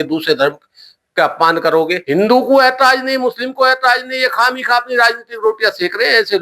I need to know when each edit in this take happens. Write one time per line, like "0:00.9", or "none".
0:02.0